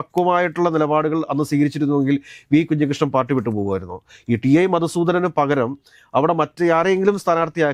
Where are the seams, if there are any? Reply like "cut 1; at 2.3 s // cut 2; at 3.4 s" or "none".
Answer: none